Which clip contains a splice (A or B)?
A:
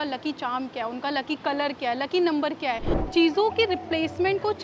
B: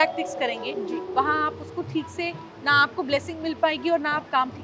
A